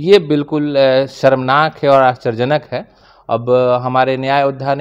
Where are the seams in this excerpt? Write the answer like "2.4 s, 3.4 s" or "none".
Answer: none